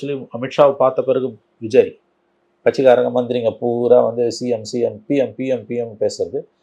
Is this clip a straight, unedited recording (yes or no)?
yes